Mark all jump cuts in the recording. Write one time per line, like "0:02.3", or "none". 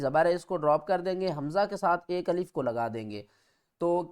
none